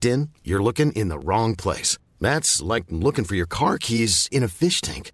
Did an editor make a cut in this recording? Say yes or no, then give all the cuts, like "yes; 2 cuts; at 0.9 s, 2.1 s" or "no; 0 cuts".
no; 0 cuts